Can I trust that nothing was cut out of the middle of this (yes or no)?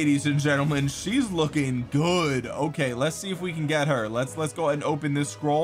yes